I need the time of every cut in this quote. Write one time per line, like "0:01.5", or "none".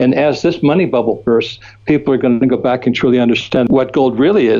0:03.7